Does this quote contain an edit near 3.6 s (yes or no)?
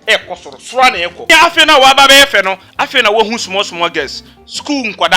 no